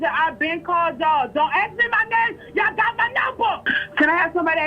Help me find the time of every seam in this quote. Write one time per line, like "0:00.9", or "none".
0:03.7